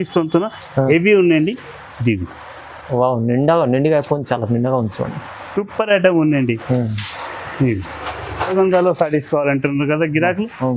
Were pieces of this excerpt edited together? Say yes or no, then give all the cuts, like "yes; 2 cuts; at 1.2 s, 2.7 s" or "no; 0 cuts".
yes; 1 cut; at 8.5 s